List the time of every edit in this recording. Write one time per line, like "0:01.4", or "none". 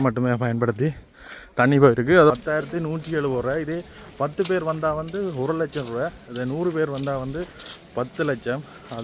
0:02.3